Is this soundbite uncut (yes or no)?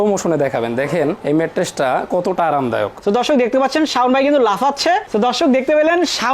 no